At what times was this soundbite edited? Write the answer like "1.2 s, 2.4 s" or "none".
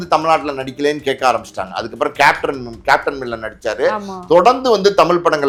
none